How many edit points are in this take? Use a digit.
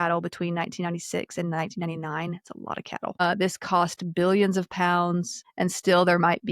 2